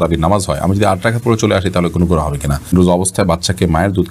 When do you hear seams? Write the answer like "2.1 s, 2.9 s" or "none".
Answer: 2.7 s